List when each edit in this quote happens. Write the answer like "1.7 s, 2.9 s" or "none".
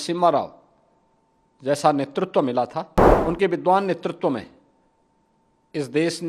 3.0 s